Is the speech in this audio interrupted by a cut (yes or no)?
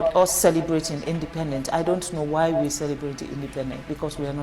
no